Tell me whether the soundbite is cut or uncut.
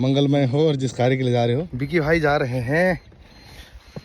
cut